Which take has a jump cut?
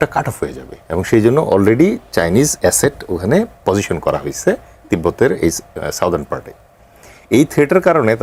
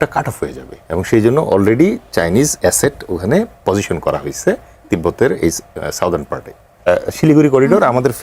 second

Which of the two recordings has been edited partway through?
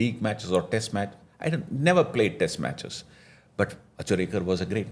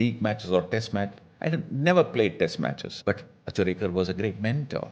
second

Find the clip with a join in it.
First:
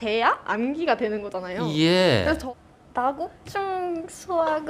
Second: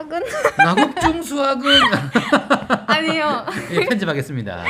first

